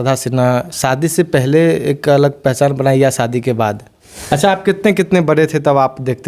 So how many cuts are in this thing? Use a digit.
1